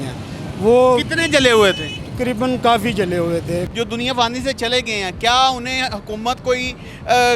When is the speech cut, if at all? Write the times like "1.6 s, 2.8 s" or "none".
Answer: 3.7 s

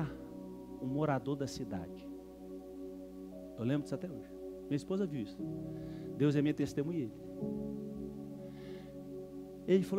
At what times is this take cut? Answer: none

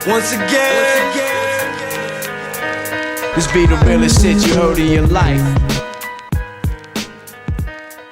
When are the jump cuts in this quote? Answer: none

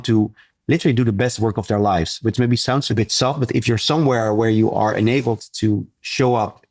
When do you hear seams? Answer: 2.9 s, 3.8 s

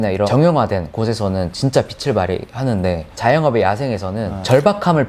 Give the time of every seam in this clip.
none

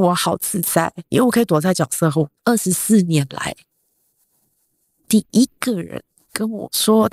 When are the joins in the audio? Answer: 1.0 s, 2.3 s

